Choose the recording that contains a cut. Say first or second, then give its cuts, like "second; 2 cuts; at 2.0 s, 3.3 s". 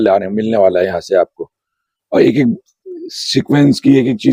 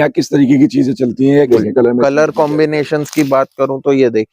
second; 1 cut; at 1.5 s